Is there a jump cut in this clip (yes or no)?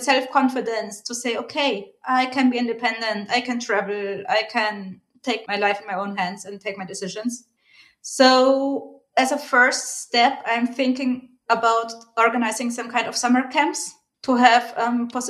yes